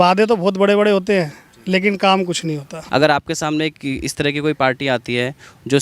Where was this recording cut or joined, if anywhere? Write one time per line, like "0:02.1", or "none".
0:02.7